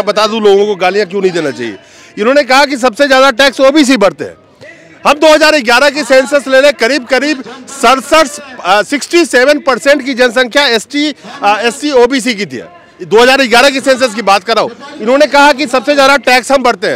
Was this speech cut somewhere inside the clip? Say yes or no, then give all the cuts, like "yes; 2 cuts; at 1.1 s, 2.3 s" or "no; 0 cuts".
no; 0 cuts